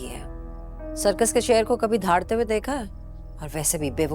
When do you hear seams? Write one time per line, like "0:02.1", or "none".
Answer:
none